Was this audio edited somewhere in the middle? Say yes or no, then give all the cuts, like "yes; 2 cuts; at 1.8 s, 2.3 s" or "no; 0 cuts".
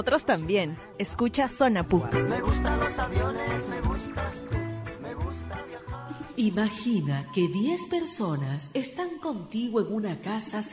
yes; 1 cut; at 6.1 s